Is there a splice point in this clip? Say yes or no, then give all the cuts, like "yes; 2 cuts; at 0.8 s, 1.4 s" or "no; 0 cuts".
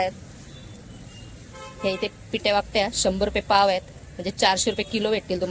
yes; 1 cut; at 2.4 s